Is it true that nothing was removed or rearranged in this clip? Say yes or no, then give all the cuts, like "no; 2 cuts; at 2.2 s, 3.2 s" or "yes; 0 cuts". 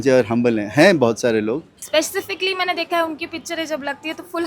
no; 1 cut; at 1.7 s